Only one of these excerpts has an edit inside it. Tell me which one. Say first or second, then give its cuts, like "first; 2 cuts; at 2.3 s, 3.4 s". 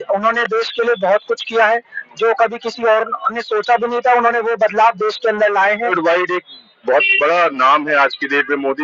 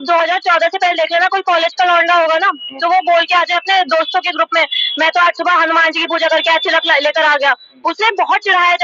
first; 1 cut; at 6.0 s